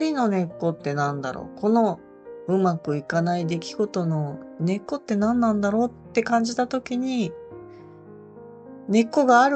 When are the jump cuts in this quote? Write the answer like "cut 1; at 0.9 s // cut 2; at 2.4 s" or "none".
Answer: none